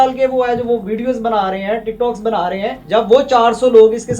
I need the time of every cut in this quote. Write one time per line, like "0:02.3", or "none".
0:02.8